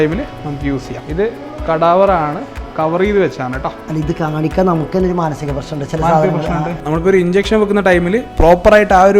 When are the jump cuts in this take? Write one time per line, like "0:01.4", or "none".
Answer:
0:01.0
0:03.8
0:06.7

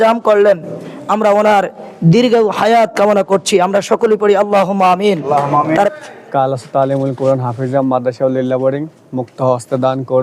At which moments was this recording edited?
0:05.9

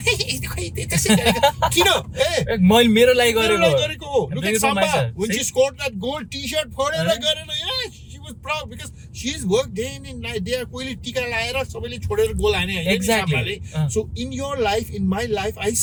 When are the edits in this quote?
none

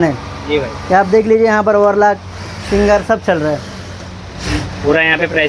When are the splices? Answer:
none

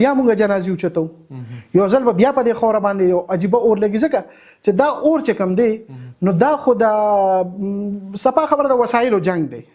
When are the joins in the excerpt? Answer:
none

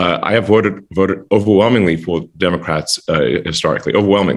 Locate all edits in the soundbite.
none

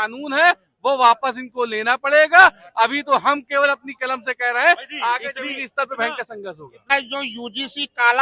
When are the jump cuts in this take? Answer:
0:06.9

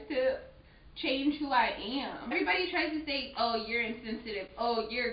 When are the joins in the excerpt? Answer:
0:02.3

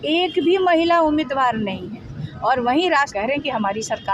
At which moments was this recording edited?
0:03.1

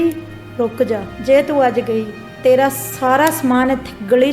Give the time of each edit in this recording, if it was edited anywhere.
0:01.1

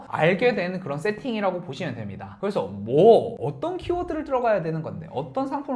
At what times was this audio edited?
0:02.3

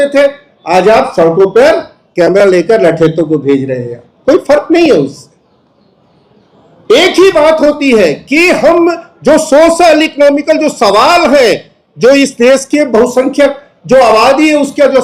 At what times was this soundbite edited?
none

